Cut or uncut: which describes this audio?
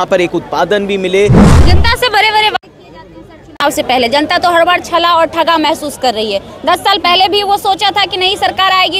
cut